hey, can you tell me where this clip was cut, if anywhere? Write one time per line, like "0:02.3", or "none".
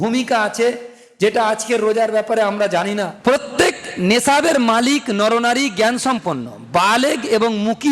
0:03.1